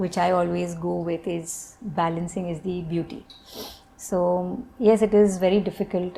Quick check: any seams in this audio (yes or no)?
no